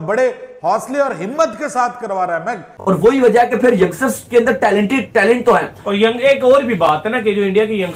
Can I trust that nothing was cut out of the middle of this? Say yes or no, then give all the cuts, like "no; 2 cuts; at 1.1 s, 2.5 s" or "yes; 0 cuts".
no; 1 cut; at 2.7 s